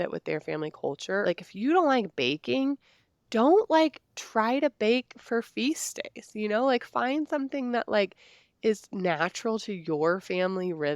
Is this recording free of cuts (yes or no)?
no